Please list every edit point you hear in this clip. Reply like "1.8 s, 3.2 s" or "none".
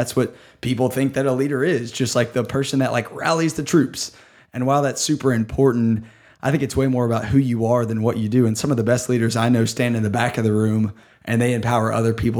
none